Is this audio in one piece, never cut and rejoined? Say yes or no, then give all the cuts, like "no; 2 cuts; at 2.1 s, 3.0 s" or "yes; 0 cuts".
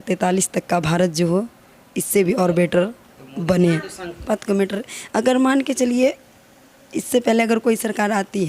no; 1 cut; at 4.2 s